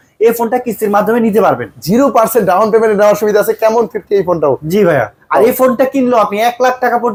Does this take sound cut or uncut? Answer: uncut